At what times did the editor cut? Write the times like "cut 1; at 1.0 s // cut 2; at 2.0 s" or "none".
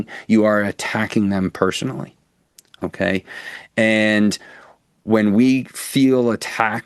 none